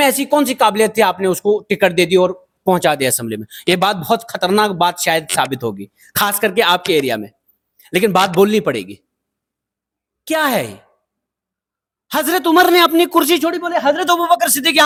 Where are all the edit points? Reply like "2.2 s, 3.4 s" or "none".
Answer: none